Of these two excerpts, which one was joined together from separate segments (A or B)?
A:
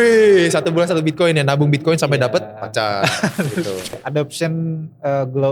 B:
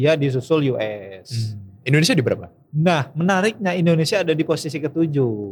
A